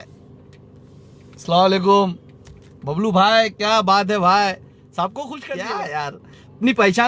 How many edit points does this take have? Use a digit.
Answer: 1